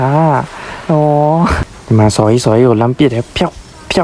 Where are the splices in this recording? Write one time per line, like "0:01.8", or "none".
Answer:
0:01.7

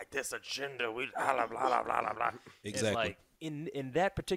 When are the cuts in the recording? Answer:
0:03.3

